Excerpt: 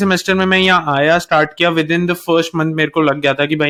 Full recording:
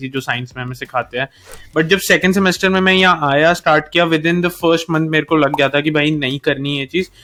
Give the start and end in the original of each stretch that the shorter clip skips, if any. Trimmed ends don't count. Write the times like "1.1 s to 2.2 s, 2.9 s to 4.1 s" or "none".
none